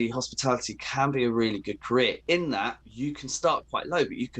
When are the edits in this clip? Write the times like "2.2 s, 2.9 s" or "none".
2.8 s